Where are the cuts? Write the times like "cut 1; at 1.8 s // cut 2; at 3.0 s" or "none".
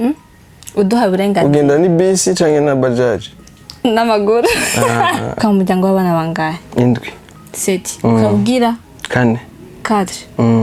cut 1; at 5.4 s